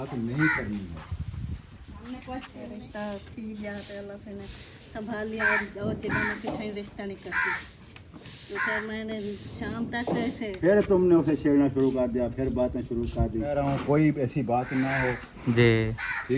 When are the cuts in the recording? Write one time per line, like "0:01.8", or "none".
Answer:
0:02.7
0:10.5
0:13.6